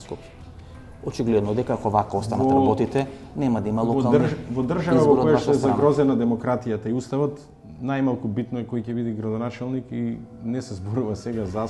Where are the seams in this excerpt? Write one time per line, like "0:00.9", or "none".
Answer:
none